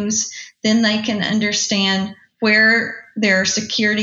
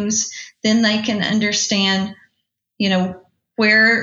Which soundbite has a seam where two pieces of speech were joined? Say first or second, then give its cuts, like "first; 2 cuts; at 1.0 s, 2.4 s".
first; 1 cut; at 2.2 s